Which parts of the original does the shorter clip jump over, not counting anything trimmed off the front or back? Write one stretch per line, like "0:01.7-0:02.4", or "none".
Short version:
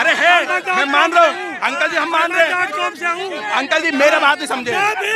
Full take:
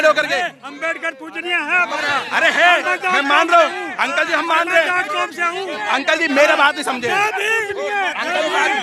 none